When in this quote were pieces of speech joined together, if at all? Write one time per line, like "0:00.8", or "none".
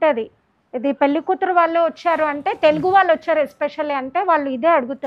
none